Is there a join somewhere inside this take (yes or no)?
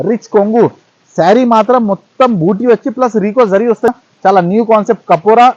yes